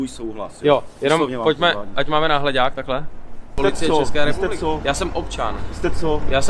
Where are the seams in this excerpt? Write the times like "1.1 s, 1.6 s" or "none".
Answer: 3.6 s